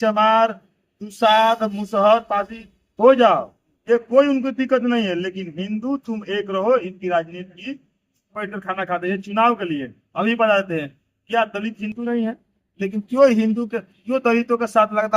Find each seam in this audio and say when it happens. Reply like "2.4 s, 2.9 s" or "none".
8.4 s